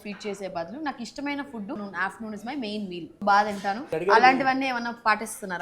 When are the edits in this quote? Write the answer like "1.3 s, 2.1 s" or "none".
1.8 s, 3.1 s, 3.9 s

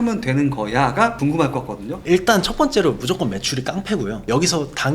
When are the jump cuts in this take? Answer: 1.6 s

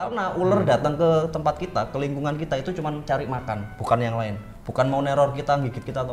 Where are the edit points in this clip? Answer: none

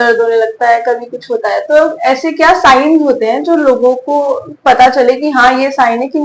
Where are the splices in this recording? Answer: none

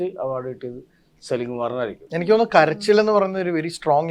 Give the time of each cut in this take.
2.0 s

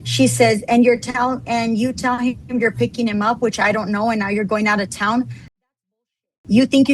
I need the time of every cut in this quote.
none

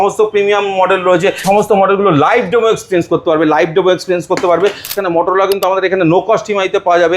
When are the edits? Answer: 1.4 s, 4.9 s

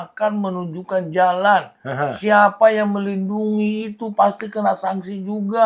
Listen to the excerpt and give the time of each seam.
none

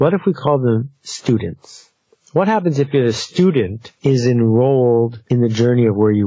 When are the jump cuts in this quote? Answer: 3.8 s, 5.2 s

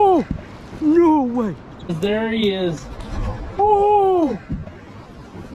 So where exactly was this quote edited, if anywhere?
none

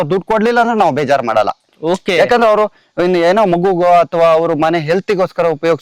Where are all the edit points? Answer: none

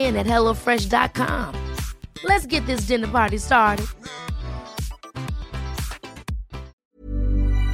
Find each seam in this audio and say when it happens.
6.8 s

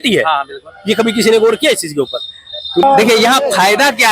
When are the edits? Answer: 2.8 s

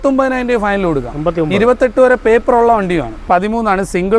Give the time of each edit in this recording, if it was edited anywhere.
3.2 s

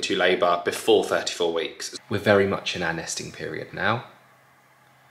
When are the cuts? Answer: 1.8 s

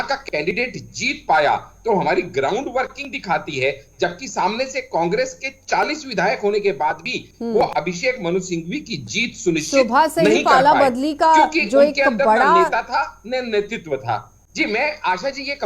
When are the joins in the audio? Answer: 14.4 s

